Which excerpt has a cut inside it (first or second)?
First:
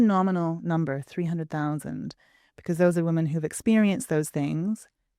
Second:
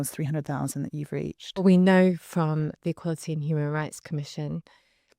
second